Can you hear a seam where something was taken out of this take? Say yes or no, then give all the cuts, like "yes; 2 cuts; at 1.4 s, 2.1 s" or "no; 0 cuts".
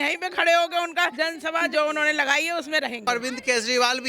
yes; 2 cuts; at 1.1 s, 3.0 s